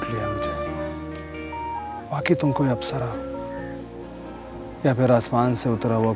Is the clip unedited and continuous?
no; 2 cuts; at 1.5 s, 4.7 s

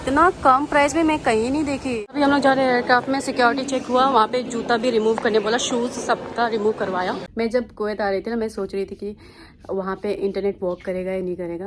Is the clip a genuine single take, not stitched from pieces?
no; 2 cuts; at 2.1 s, 7.2 s

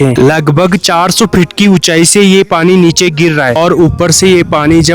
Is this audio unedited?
no; 1 cut; at 3.6 s

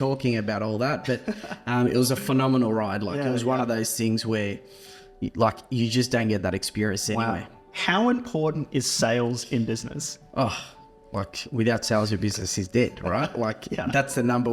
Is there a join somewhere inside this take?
yes; 1 cut; at 7.6 s

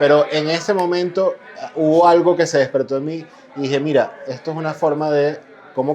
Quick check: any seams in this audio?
no; 0 cuts

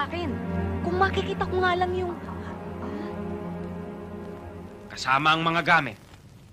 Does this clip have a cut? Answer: yes; 1 cut; at 4.9 s

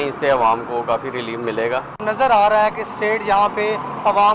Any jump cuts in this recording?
no; 0 cuts

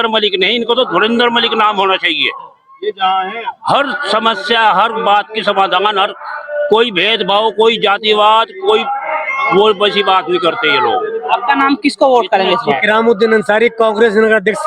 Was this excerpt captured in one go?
yes; 0 cuts

